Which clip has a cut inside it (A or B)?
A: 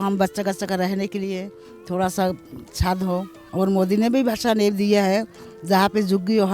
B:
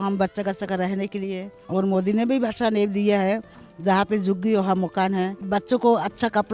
B